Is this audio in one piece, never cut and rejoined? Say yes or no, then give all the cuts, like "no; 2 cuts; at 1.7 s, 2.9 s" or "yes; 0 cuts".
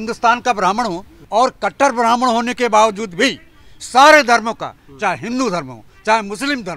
no; 1 cut; at 1.1 s